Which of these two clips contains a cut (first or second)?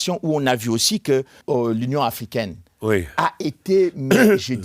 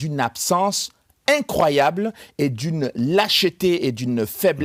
first